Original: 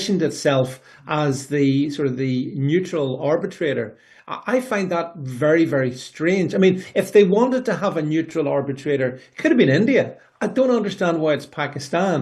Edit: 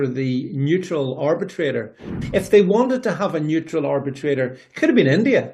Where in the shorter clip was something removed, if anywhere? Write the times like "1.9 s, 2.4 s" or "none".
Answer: 2.2 s